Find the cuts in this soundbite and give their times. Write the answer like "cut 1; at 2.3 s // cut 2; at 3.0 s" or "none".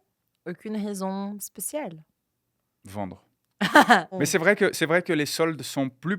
cut 1; at 4.1 s